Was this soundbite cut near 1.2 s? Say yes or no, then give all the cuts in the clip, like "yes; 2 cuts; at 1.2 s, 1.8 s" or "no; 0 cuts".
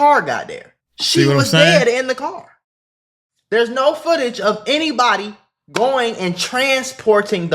yes; 1 cut; at 1.2 s